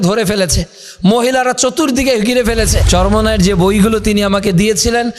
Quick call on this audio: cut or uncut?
cut